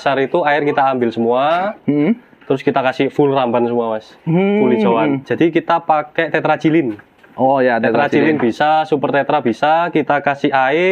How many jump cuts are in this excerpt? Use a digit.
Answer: 1